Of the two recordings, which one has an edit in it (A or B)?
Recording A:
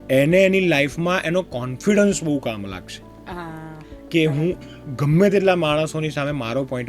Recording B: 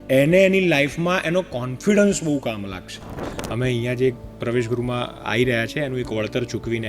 B